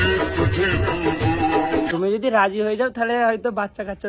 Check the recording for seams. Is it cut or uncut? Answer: cut